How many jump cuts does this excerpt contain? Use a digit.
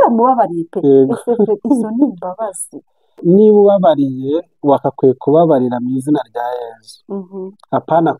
0